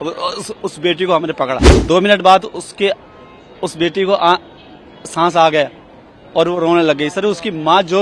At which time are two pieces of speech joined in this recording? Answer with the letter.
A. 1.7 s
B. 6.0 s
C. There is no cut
A